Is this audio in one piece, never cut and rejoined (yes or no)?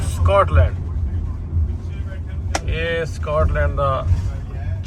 yes